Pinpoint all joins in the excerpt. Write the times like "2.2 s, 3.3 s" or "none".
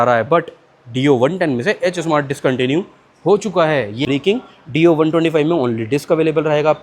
4.0 s